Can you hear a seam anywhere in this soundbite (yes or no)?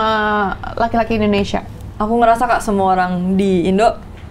no